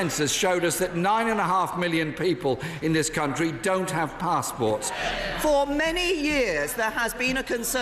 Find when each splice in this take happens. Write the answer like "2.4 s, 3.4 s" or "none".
5.0 s